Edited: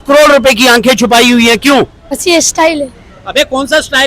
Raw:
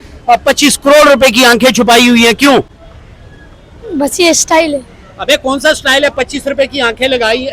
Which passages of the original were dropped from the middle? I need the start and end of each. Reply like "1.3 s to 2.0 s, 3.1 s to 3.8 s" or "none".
2.9 s to 4.1 s